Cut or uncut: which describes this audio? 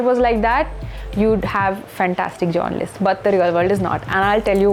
uncut